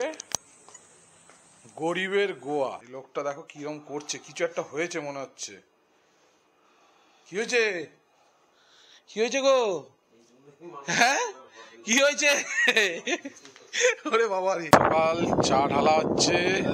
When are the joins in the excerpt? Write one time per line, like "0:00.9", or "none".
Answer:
0:02.8
0:14.6